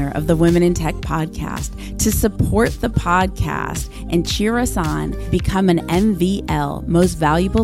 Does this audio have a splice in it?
no; 0 cuts

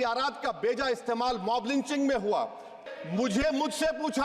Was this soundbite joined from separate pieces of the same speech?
yes; 1 cut; at 2.8 s

